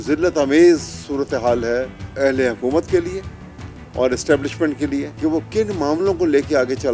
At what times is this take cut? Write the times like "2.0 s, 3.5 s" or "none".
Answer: 2.0 s, 5.1 s